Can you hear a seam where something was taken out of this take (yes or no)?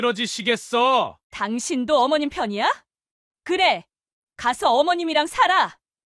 no